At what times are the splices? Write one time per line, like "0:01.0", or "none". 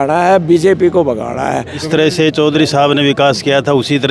0:01.8